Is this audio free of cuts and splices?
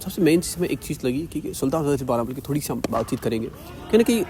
yes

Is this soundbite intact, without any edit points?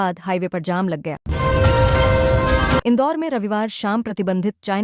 no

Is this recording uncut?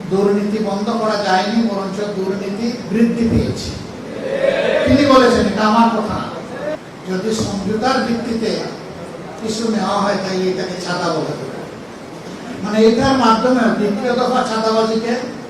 no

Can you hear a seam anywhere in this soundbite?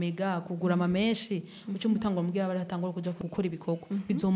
yes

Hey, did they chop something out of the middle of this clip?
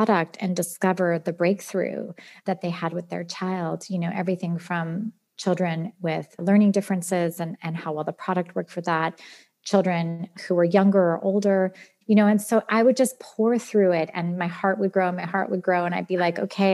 yes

